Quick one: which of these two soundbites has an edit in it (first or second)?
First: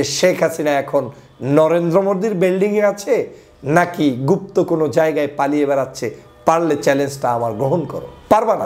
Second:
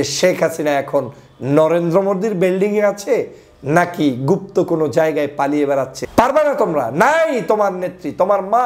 second